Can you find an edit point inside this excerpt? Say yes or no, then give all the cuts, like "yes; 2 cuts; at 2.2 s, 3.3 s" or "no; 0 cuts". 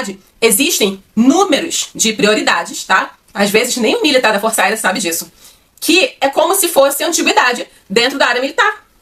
no; 0 cuts